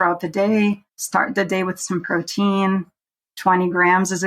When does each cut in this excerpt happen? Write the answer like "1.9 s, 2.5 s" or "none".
0.9 s